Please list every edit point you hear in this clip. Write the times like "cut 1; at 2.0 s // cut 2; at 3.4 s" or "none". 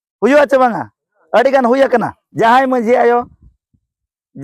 cut 1; at 2.2 s